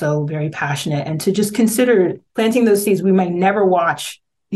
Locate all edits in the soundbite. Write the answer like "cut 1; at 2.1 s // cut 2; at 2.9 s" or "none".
cut 1; at 2.2 s

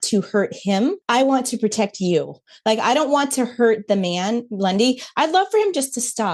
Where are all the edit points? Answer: cut 1; at 1.0 s

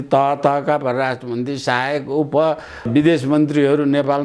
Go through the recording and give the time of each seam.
cut 1; at 2.9 s

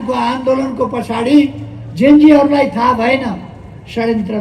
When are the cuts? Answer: none

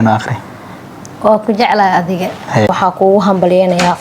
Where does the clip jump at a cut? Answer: cut 1; at 2.7 s

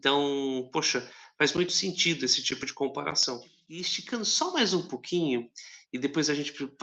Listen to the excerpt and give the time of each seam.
cut 1; at 3.7 s

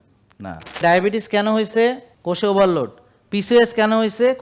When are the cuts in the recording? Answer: cut 1; at 0.8 s // cut 2; at 2.1 s

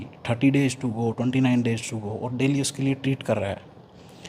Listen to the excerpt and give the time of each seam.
none

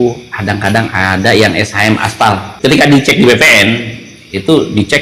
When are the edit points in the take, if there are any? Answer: cut 1; at 2.5 s

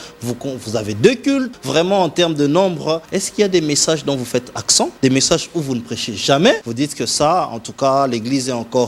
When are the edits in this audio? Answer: cut 1; at 1.5 s // cut 2; at 3.1 s // cut 3; at 4.9 s // cut 4; at 6.7 s

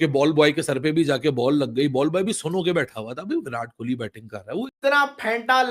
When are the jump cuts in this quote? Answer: cut 1; at 4.7 s

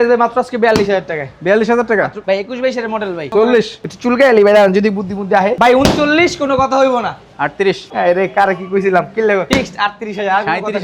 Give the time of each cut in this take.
cut 1; at 2.2 s // cut 2; at 3.3 s // cut 3; at 5.5 s // cut 4; at 7.9 s // cut 5; at 9.5 s

